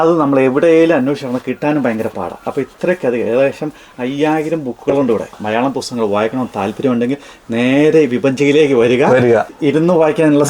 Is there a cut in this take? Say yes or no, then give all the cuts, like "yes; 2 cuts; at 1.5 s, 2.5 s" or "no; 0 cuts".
yes; 2 cuts; at 5.3 s, 9.5 s